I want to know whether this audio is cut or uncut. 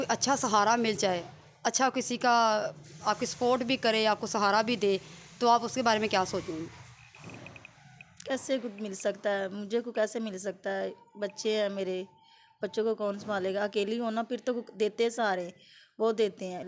uncut